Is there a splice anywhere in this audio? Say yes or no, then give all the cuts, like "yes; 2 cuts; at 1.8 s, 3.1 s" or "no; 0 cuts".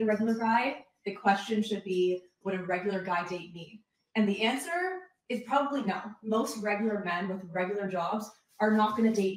no; 0 cuts